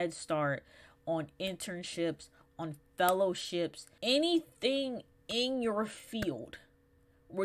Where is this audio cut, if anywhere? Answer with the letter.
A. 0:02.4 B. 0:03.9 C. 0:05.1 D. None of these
B